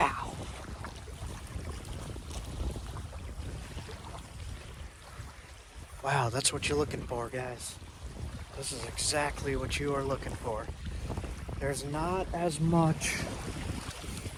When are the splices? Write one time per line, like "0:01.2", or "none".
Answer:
none